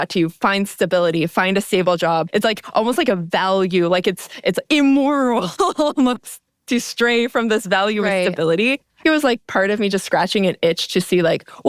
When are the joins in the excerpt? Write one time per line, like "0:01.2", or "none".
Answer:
0:02.3
0:09.0